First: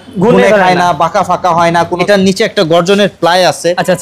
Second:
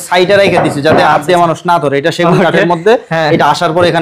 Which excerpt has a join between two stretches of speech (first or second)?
first